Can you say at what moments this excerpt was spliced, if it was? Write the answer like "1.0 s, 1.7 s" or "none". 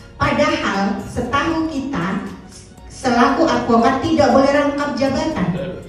none